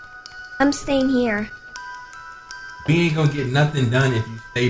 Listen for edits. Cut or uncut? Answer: uncut